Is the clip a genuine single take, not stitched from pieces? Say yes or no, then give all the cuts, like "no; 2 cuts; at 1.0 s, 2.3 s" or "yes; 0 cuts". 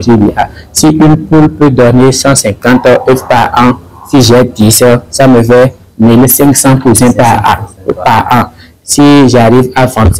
yes; 0 cuts